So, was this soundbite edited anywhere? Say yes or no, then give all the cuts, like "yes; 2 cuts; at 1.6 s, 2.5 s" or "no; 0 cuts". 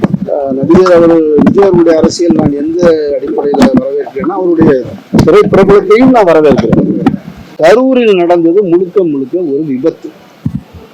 yes; 1 cut; at 7.5 s